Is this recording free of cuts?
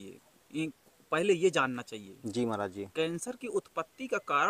yes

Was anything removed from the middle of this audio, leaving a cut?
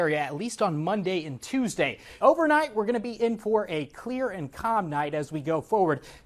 yes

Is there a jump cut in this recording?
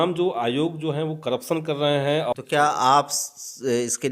yes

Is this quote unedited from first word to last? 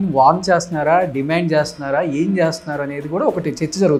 yes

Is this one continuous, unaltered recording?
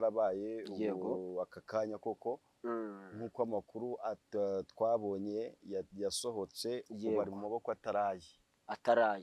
yes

